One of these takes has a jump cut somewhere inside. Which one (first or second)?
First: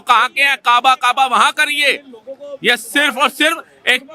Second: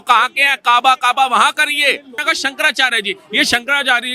second